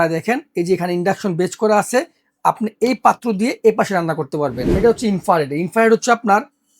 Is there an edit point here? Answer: yes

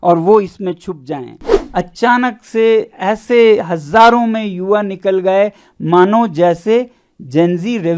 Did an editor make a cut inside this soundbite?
yes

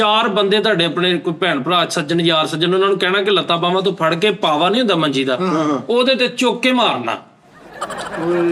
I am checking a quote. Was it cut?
no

